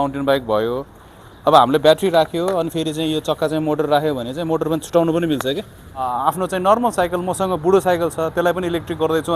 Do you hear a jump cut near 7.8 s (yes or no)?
no